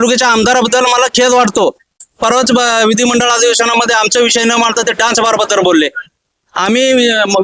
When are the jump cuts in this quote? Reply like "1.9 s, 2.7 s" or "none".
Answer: 2.1 s, 6.0 s